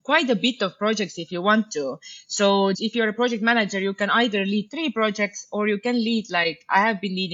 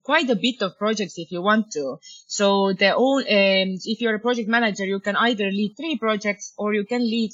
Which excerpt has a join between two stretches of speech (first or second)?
first